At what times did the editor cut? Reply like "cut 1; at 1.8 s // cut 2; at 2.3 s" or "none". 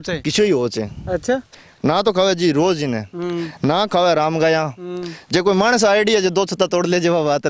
cut 1; at 1.5 s